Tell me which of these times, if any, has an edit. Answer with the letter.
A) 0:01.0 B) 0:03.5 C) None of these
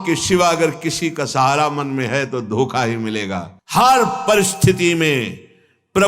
B